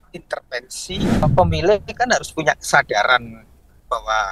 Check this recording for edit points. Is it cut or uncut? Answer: cut